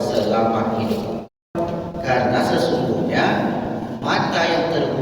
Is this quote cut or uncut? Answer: cut